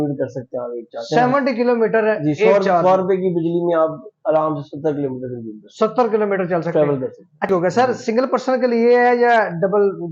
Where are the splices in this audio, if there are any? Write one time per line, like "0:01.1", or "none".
0:07.5